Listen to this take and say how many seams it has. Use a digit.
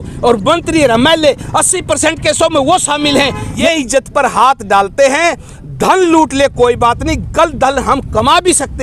1